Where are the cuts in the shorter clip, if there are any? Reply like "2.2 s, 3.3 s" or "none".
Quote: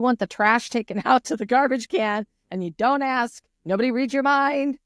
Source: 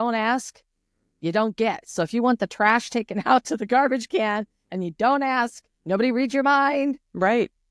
none